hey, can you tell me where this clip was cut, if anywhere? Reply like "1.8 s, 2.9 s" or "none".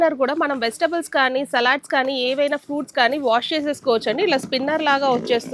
none